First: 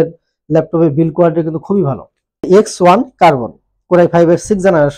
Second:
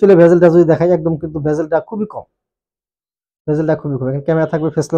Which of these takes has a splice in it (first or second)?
first